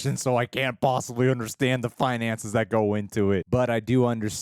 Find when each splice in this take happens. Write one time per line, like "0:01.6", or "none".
0:03.4